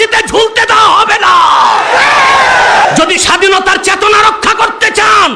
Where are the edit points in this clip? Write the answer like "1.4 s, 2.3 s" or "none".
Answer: 2.8 s